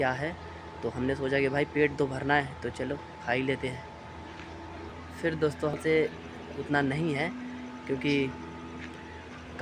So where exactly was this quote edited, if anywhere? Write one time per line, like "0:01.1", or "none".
0:05.8